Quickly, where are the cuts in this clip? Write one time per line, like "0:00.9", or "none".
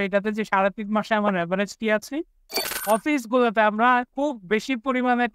0:02.7
0:04.1